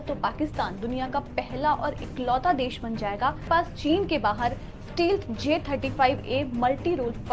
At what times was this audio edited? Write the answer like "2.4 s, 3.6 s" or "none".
none